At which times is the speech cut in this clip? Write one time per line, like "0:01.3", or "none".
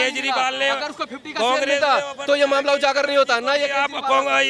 none